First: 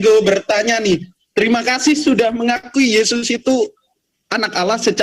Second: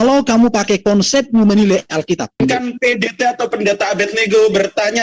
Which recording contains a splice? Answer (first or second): second